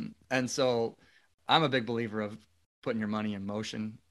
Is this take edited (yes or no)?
yes